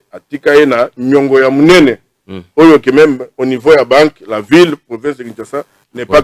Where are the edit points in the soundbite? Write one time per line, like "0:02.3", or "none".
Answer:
none